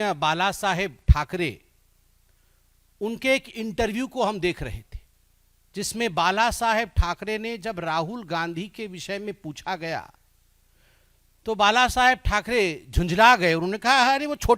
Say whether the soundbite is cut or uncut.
uncut